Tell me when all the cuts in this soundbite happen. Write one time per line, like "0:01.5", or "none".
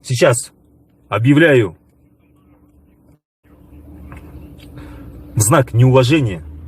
none